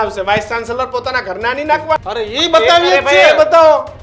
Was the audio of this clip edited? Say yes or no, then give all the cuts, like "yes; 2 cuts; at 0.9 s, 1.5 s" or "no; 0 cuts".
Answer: yes; 1 cut; at 2.0 s